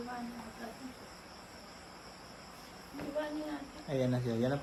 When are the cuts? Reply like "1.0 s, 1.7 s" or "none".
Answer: none